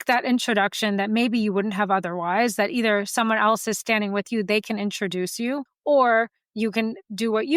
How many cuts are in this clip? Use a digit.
1